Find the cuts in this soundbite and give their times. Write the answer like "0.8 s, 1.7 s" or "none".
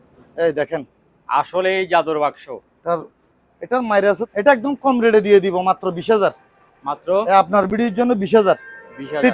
4.2 s